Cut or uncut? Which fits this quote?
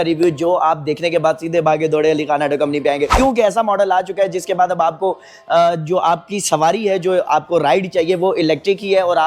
cut